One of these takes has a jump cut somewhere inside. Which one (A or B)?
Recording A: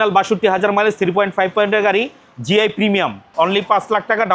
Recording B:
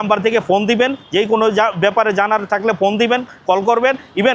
A